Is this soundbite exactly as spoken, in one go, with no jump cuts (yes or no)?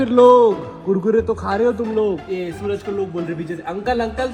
yes